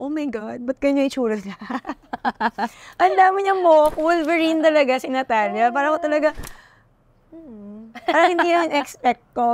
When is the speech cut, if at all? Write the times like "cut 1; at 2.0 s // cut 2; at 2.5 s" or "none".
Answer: none